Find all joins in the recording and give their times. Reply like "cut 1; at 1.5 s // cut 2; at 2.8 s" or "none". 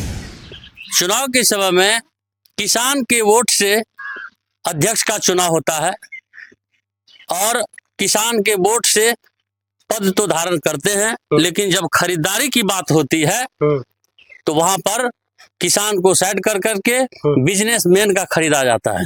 none